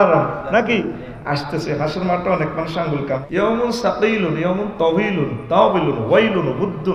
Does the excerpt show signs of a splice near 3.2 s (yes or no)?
yes